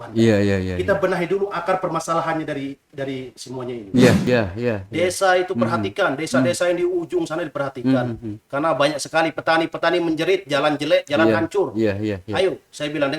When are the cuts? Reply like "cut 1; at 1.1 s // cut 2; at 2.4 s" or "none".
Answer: cut 1; at 4.2 s